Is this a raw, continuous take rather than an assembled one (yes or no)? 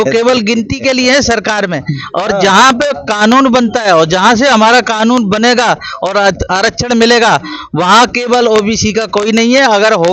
yes